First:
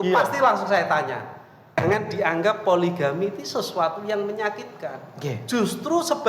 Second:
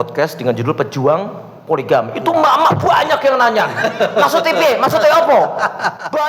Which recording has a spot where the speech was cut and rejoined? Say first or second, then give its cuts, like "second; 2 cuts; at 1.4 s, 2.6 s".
first; 1 cut; at 1.8 s